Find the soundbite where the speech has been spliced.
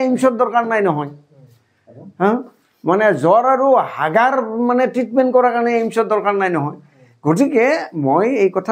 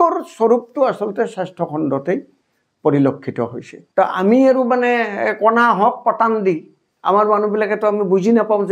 second; 1 cut; at 3.7 s

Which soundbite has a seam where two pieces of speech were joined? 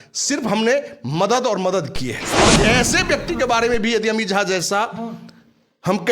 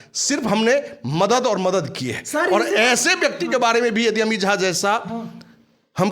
first; 1 cut; at 2.4 s

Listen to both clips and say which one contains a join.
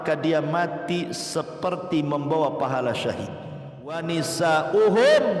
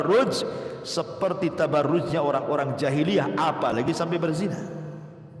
first; 1 cut; at 4.0 s

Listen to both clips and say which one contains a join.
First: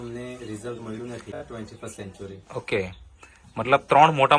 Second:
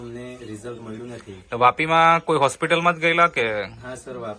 first; 1 cut; at 1.4 s

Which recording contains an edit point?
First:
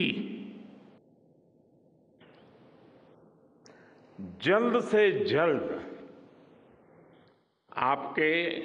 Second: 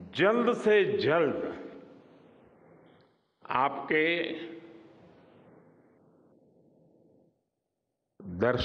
first; 1 cut; at 1.0 s

